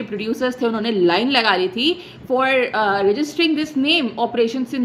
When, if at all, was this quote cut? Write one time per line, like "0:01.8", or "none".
none